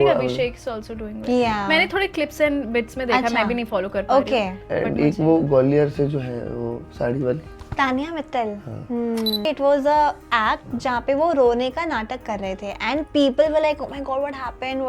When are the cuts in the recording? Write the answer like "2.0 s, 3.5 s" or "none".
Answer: 9.4 s